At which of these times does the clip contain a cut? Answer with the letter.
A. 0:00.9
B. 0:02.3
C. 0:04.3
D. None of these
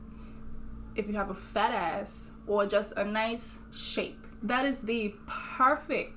C